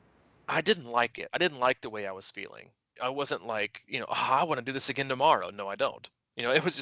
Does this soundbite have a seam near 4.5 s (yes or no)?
no